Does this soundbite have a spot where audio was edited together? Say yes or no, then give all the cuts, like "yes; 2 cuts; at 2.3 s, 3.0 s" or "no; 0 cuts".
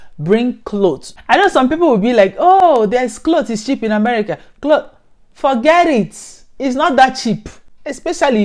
yes; 1 cut; at 1.3 s